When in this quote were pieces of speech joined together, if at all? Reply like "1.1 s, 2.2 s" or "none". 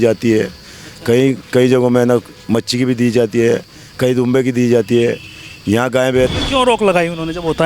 6.3 s